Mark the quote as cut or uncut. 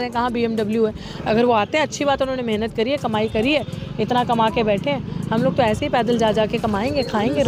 uncut